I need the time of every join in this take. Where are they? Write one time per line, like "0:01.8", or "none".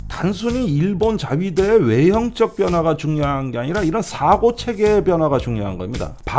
none

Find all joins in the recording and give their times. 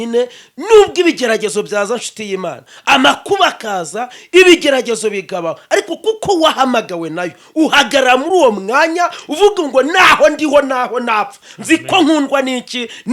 none

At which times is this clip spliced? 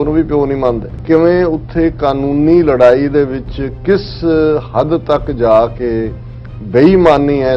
0:01.0

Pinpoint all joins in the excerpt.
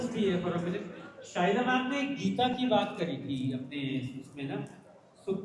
none

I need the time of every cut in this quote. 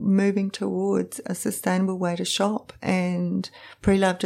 none

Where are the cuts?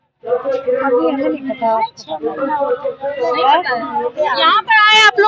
none

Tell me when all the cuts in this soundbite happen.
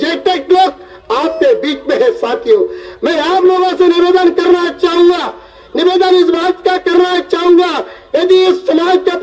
none

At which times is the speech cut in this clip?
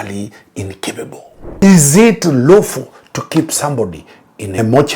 0:01.4

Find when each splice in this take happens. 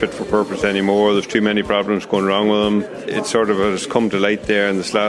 0:03.0

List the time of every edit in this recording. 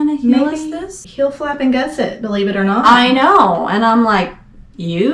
0:01.0

